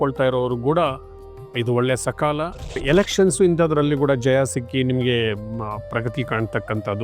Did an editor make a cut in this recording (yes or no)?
yes